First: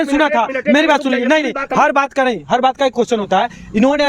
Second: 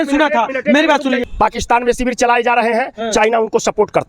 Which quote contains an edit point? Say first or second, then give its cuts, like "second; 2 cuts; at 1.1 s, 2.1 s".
second; 1 cut; at 1.2 s